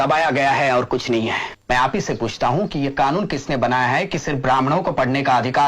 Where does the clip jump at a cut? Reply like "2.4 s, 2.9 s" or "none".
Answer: 1.5 s